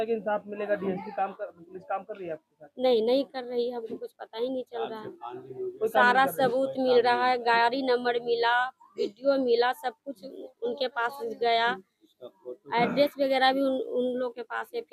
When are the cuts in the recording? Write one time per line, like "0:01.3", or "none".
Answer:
none